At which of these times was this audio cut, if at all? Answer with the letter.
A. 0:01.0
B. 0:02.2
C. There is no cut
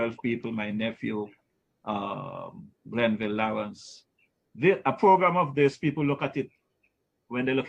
C